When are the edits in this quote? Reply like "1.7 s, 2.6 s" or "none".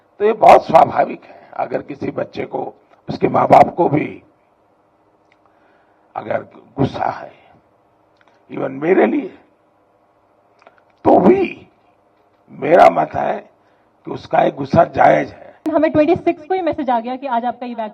15.7 s